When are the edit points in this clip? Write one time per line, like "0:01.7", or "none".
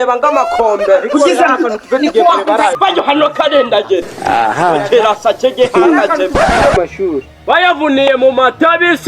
0:02.8
0:06.8